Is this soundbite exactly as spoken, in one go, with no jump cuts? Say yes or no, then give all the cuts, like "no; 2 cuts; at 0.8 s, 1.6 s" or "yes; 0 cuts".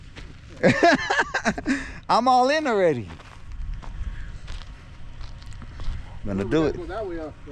yes; 0 cuts